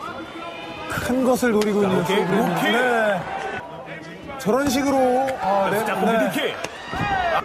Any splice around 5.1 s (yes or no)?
yes